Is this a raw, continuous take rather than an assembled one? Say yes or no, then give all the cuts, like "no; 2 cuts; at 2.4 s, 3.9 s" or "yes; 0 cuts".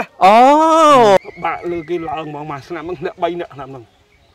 no; 1 cut; at 1.2 s